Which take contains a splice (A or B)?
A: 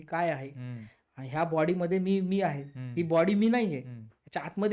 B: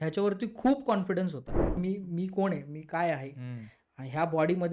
B